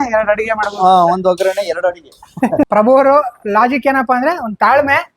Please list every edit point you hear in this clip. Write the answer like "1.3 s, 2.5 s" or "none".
2.7 s